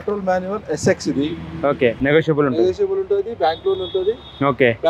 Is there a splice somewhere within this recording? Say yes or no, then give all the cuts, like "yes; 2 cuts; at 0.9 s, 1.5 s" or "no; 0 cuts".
yes; 1 cut; at 2.0 s